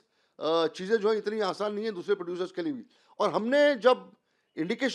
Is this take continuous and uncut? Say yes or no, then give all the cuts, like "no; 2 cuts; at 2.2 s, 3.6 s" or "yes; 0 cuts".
yes; 0 cuts